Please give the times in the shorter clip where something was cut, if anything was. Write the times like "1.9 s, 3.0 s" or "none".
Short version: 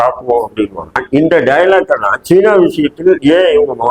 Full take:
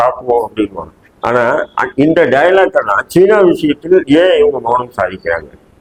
0.9 s